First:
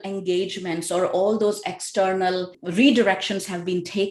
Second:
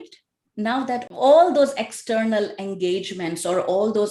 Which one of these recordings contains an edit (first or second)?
first